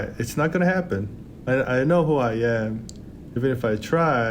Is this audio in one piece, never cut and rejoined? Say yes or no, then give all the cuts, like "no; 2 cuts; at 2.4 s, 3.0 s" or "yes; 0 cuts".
no; 2 cuts; at 1.4 s, 3.4 s